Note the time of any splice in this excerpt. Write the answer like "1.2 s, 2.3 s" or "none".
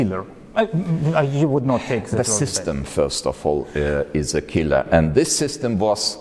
none